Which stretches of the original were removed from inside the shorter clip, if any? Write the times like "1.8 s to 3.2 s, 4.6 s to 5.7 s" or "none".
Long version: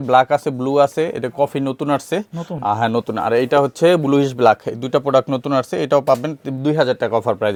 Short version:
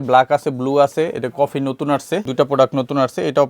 2.3 s to 4.8 s